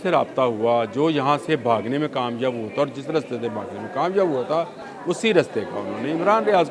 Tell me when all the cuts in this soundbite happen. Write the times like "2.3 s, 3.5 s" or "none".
4.9 s